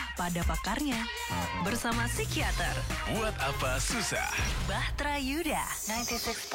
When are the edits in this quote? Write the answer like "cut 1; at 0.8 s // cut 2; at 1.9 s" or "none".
none